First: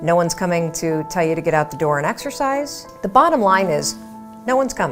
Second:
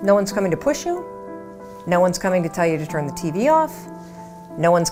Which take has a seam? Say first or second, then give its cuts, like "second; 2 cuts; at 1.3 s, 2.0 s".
first; 1 cut; at 2.8 s